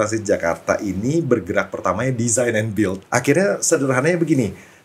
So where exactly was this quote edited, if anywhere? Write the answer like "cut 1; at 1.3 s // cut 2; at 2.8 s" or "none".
cut 1; at 3.0 s